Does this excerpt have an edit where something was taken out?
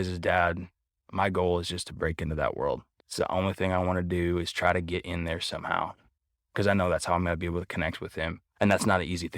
yes; 2 cuts; at 3.0 s, 8.4 s

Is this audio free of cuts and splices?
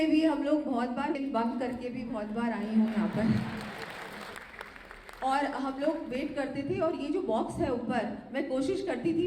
no; 2 cuts; at 1.2 s, 4.3 s

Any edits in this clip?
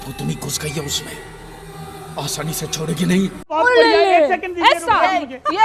yes; 1 cut; at 3.5 s

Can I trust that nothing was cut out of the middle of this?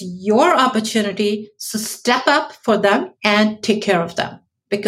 no; 1 cut; at 3.1 s

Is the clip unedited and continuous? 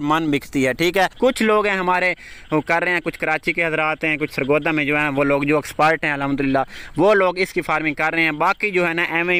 no; 1 cut; at 1.1 s

